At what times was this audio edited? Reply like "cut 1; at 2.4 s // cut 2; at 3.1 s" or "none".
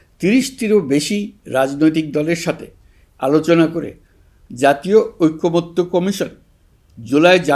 none